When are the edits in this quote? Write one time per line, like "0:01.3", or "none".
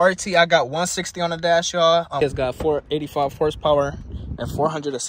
0:02.2